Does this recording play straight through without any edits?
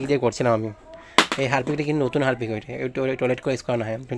yes; 0 cuts

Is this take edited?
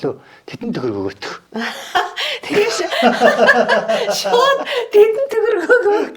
yes; 1 cut; at 1.3 s

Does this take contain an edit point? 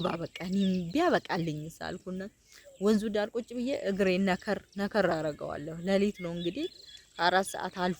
no; 0 cuts

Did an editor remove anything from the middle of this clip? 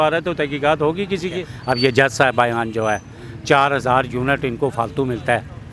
yes; 1 cut; at 1.5 s

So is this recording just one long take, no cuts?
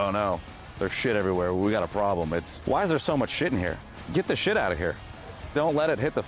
no; 3 cuts; at 2.5 s, 4.0 s, 5.5 s

